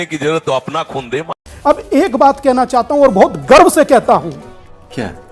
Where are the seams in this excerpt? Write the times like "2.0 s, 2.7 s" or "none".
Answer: 1.5 s